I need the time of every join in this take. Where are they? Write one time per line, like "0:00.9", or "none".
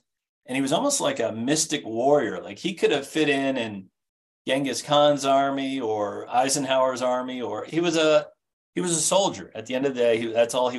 0:06.2
0:07.6